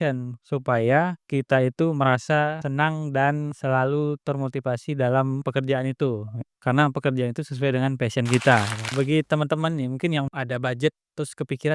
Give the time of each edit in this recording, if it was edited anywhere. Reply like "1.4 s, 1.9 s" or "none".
8.8 s, 10.3 s